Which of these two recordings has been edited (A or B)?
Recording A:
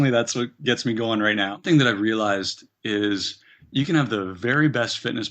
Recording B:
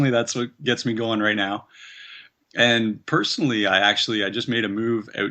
A